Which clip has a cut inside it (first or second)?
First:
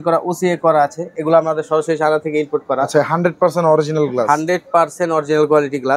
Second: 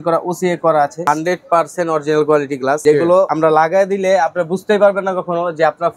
second